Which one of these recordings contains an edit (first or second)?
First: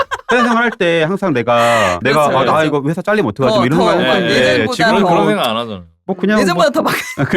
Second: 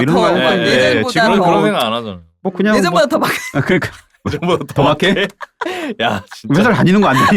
first